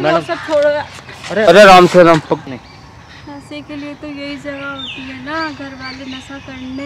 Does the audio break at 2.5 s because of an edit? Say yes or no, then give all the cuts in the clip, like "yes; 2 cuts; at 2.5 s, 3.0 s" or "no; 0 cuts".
yes; 1 cut; at 2.5 s